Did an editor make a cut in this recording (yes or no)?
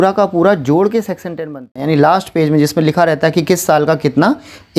yes